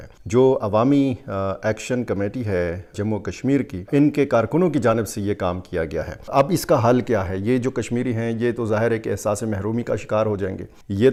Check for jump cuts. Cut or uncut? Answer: uncut